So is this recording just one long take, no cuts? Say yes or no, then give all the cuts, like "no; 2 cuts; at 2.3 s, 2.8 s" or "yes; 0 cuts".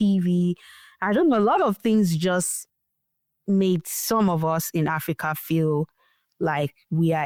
yes; 0 cuts